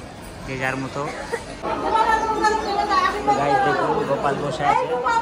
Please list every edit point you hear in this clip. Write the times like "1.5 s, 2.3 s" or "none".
1.6 s